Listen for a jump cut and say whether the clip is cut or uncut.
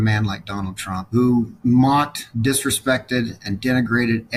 uncut